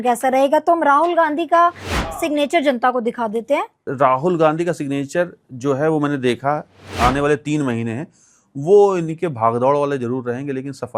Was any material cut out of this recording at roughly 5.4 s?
no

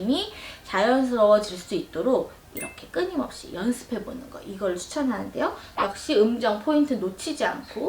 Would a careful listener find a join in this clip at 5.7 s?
yes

